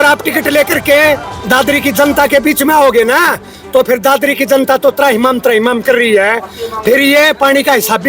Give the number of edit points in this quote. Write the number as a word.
zero